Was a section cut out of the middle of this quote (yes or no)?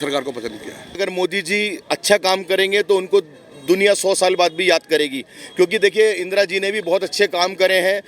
yes